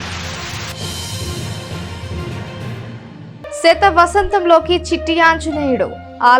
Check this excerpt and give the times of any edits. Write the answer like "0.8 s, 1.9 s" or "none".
3.6 s